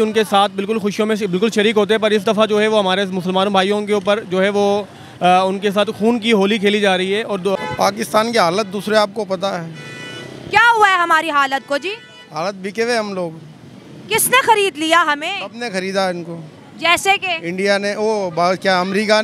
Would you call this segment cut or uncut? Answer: cut